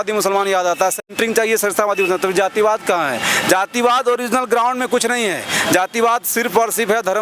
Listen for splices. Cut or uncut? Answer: uncut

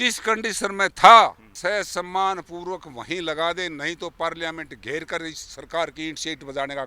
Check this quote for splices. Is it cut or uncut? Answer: cut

